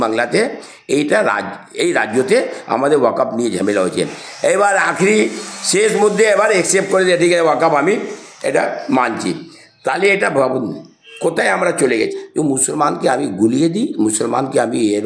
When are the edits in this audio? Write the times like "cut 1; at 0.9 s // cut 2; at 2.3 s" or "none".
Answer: cut 1; at 12.1 s